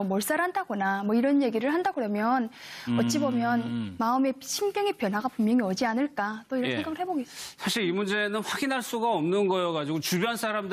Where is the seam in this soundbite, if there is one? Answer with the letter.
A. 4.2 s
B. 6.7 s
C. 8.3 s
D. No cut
D